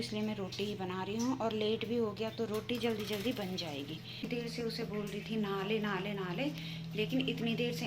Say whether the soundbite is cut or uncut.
cut